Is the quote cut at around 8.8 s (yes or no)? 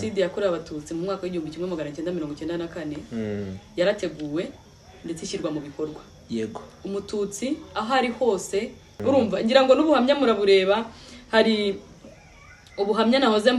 yes